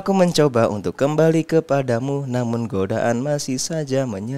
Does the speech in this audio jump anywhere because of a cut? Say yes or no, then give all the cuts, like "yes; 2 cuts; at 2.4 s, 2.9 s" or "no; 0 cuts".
no; 0 cuts